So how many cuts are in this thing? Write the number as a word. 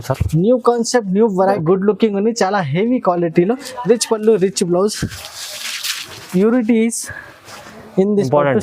one